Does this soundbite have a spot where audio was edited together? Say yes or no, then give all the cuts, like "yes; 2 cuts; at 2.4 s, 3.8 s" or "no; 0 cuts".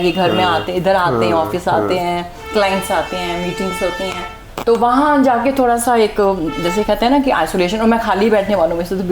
yes; 1 cut; at 4.4 s